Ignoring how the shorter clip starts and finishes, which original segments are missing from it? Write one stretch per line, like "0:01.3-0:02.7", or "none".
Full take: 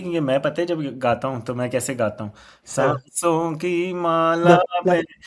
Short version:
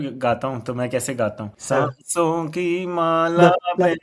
0:02.3-0:02.6